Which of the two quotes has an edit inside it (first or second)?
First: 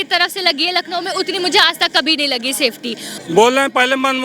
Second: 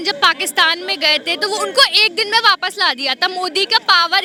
first